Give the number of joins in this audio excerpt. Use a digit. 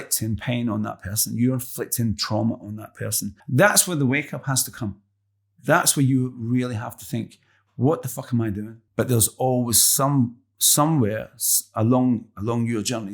2